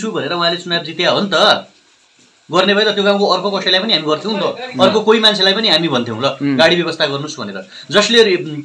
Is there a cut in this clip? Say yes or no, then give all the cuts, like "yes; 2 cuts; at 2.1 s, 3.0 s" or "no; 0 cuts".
no; 0 cuts